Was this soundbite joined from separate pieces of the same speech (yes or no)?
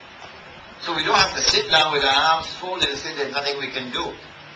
no